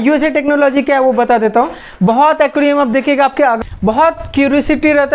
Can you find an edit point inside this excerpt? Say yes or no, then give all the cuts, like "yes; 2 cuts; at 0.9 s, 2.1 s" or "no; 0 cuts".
yes; 1 cut; at 3.6 s